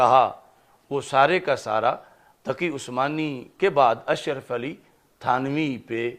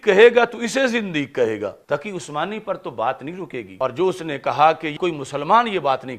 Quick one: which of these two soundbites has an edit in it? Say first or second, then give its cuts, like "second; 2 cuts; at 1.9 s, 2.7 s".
second; 3 cuts; at 1.8 s, 3.7 s, 4.9 s